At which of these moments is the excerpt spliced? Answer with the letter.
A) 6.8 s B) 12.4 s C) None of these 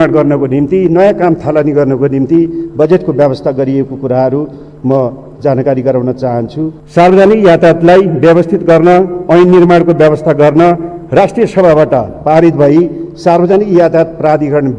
A